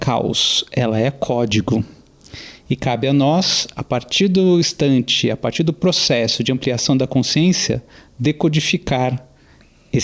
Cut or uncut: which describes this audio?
uncut